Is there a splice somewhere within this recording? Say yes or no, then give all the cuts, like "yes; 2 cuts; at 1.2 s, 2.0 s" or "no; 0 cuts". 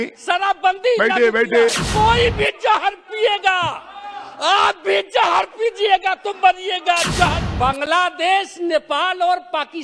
yes; 2 cuts; at 1.9 s, 7.5 s